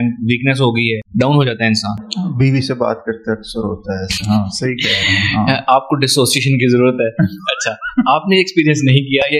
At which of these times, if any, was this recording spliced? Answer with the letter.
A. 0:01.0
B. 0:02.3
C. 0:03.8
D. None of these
A